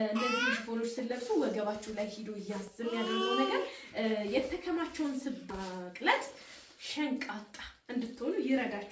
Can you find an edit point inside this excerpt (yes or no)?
yes